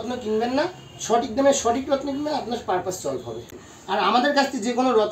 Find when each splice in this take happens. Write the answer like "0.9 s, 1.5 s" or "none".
3.5 s